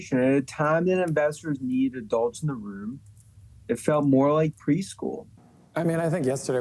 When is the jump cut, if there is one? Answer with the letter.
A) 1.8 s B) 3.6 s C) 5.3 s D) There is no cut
C